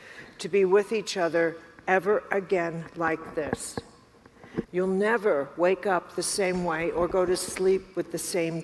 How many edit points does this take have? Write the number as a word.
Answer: one